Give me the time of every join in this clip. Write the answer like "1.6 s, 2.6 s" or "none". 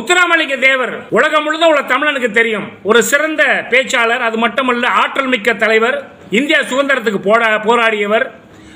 1.0 s